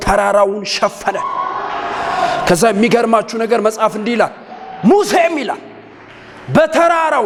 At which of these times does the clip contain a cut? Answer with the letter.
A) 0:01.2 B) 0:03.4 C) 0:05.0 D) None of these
D